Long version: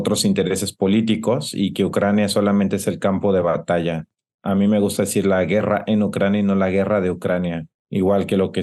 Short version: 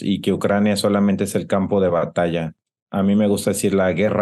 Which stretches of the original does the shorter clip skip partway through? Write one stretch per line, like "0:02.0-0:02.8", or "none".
none